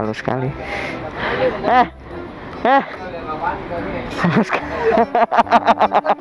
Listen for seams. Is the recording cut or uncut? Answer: uncut